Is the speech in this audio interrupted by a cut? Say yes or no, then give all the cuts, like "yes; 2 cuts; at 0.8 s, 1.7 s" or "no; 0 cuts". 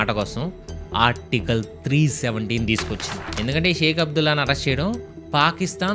yes; 1 cut; at 3.2 s